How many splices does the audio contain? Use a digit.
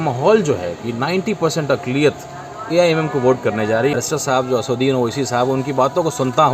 1